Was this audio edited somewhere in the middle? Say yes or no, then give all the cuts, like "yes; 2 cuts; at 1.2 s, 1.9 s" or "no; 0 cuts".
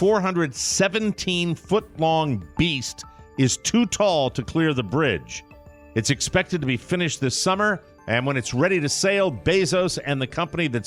no; 0 cuts